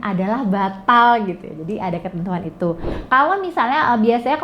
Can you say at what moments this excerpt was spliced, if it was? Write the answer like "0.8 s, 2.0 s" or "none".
2.9 s